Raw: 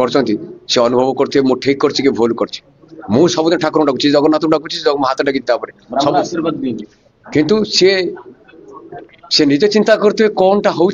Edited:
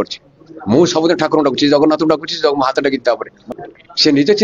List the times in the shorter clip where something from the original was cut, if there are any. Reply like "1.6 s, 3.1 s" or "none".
3.3 s